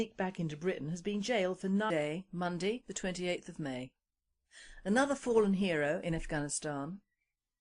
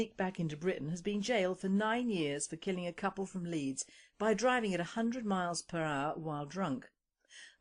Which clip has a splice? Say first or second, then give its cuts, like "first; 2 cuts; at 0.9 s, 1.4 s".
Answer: second; 1 cut; at 1.9 s